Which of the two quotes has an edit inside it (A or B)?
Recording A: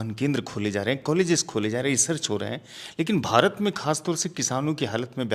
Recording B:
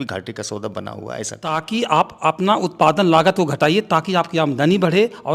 B